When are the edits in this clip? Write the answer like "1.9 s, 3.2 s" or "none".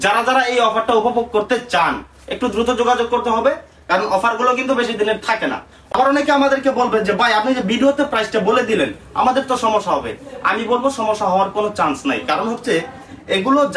5.7 s